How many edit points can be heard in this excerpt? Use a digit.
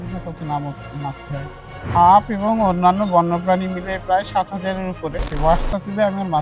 2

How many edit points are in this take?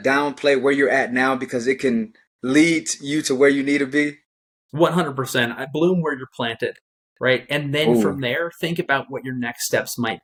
0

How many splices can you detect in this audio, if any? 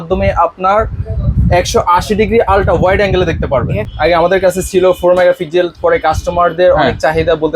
1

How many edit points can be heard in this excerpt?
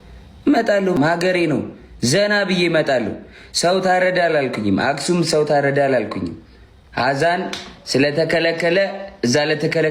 1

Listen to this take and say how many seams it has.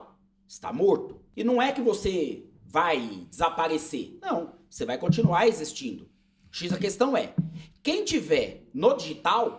1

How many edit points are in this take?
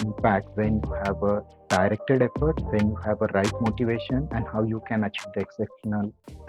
2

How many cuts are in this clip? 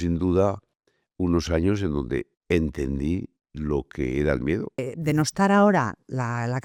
1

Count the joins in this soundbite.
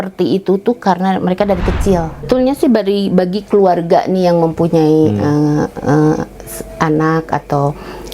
1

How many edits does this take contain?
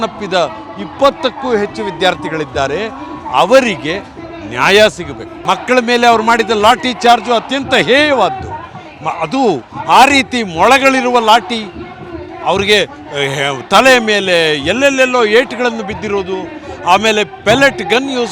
1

